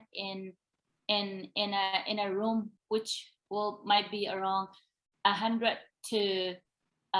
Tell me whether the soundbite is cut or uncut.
uncut